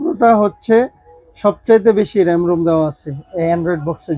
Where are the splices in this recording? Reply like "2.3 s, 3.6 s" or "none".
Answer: none